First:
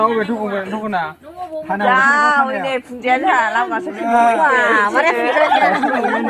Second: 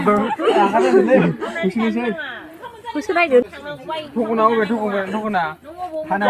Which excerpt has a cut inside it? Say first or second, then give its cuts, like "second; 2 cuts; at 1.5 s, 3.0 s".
second; 1 cut; at 3.5 s